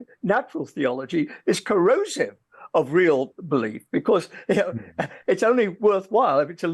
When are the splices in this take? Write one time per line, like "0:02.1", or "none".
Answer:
none